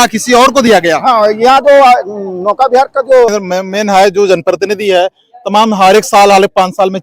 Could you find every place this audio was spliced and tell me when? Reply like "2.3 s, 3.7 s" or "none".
3.3 s